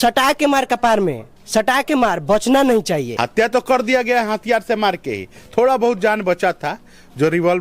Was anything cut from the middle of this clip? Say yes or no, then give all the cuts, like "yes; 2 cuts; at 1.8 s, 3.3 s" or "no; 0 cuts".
yes; 1 cut; at 3.2 s